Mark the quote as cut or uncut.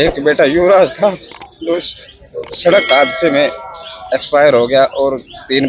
uncut